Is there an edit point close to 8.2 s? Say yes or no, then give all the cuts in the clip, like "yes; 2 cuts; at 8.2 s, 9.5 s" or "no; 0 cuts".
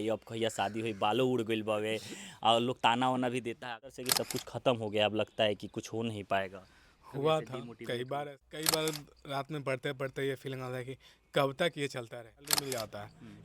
yes; 3 cuts; at 4.0 s, 8.2 s, 12.6 s